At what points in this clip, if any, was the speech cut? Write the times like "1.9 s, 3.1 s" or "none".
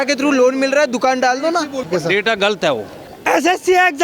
1.8 s, 3.1 s